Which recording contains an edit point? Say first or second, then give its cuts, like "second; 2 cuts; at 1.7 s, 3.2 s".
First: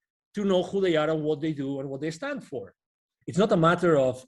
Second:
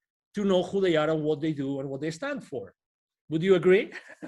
first; 1 cut; at 3.1 s